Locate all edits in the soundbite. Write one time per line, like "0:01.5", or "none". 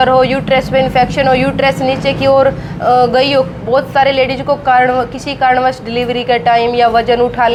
none